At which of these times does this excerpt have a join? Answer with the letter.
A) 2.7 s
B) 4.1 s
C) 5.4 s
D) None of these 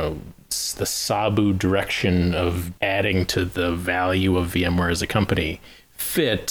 A